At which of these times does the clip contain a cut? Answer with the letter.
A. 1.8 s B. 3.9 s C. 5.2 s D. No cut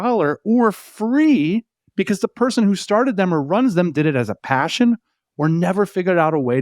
A